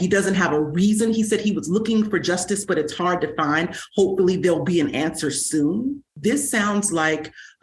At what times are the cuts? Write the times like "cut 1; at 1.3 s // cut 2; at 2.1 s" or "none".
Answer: cut 1; at 6.1 s